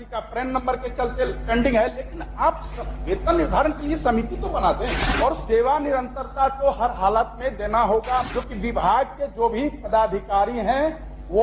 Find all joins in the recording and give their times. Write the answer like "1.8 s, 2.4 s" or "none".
5.4 s, 8.8 s